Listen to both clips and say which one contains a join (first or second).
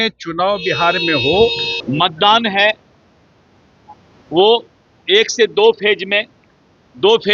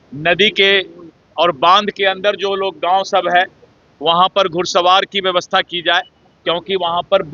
first